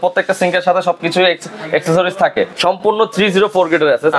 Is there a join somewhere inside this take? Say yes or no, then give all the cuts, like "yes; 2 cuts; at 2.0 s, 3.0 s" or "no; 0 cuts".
yes; 1 cut; at 2.5 s